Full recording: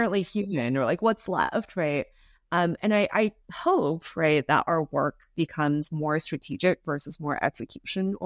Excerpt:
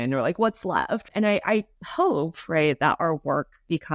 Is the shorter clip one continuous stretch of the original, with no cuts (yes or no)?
no